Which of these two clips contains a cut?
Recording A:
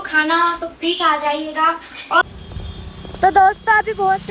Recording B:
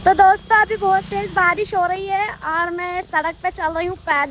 A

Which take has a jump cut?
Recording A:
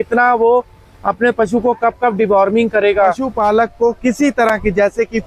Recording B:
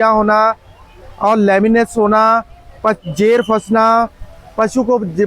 A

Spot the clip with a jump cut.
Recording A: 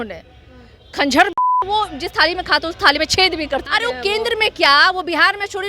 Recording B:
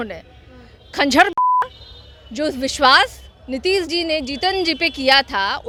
A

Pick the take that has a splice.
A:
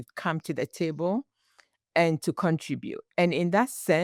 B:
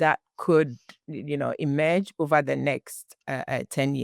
B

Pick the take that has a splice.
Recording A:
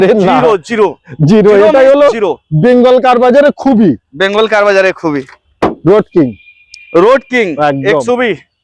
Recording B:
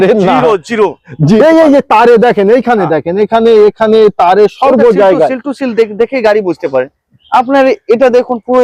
B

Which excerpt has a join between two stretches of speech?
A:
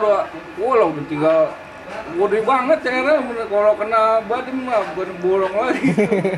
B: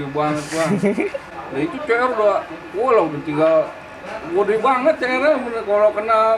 B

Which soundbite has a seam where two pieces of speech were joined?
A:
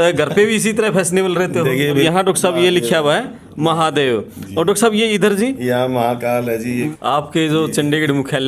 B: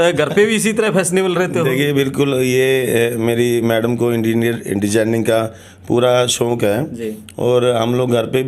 A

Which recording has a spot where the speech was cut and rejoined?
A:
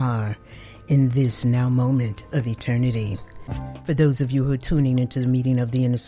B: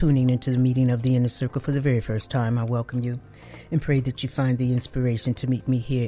A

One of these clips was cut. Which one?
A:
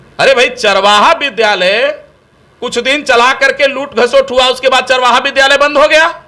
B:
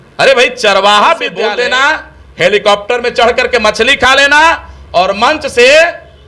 B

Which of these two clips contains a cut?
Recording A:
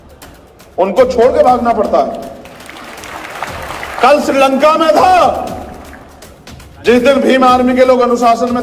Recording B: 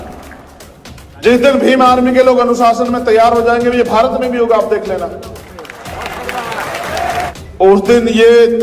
B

